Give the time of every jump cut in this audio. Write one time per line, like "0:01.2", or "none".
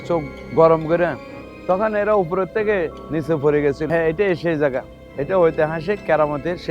0:03.9